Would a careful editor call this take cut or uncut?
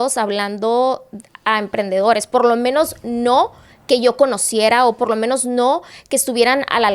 uncut